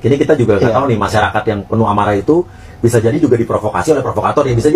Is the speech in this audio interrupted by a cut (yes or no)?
no